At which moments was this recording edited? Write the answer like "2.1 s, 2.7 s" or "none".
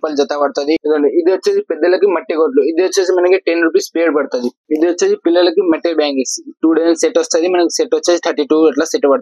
0.8 s, 4.6 s